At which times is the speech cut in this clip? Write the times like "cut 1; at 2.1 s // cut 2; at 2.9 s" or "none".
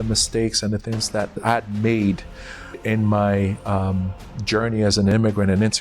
cut 1; at 1.4 s // cut 2; at 2.8 s // cut 3; at 5.1 s

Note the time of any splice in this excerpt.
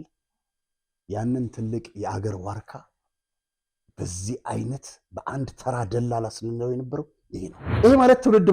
cut 1; at 7.6 s

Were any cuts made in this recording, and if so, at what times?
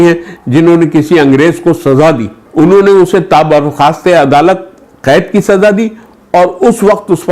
cut 1; at 2.4 s

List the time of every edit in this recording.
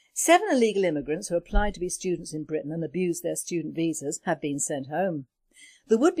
none

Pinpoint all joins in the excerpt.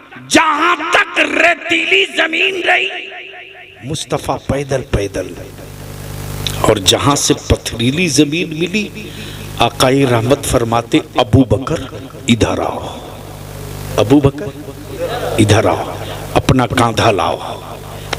none

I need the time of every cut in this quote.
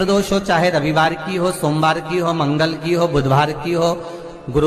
none

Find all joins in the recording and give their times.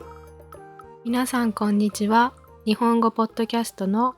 cut 1; at 1.0 s

